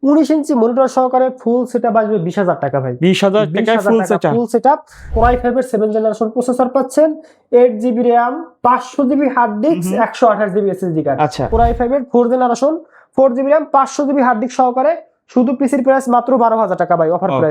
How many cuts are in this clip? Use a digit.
2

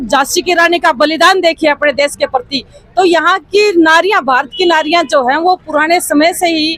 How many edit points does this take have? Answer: 0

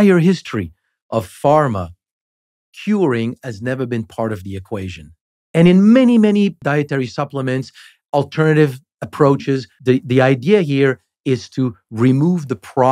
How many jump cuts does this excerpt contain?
2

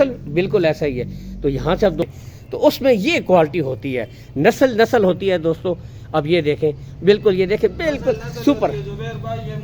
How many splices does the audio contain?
1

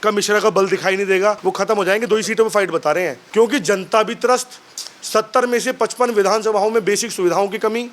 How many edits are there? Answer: 2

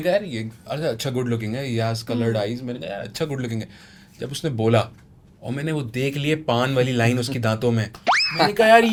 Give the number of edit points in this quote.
0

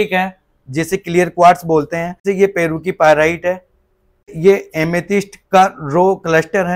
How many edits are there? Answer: 2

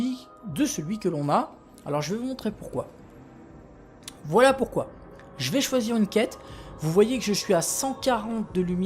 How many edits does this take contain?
1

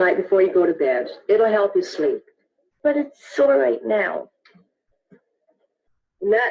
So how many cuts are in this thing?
0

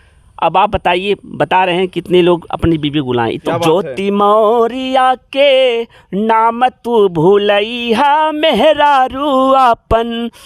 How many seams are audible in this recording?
1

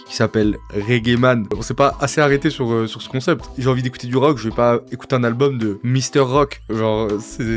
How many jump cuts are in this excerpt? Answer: 3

